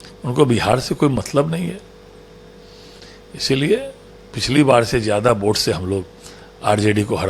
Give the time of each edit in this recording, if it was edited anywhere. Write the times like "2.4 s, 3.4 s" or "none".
none

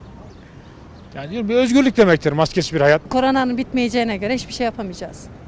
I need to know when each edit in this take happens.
3.1 s

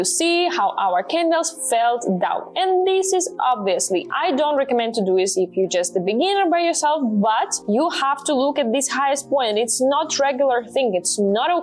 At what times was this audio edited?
4.1 s, 7.5 s

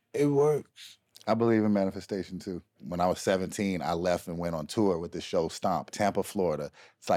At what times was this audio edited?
2.8 s, 5.9 s

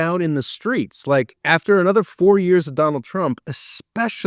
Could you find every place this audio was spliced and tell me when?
1.2 s

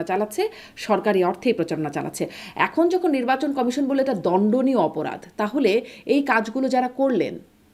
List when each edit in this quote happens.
none

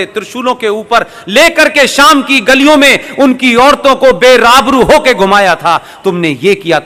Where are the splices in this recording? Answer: none

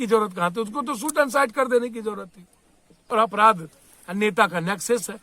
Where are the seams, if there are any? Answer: 3.1 s

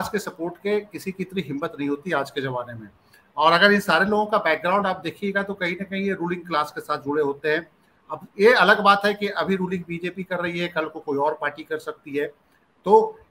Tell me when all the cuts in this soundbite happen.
none

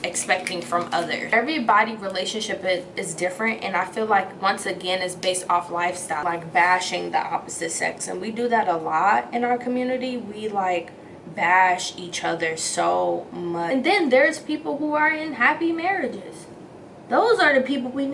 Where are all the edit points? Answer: 1.3 s, 6.2 s, 13.7 s

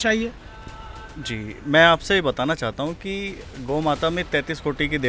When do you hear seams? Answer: none

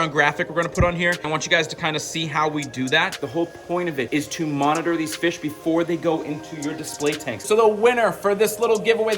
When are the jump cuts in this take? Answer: 1.3 s, 3.1 s, 4.1 s, 7.4 s

